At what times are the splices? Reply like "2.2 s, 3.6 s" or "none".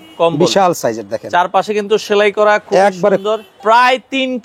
3.5 s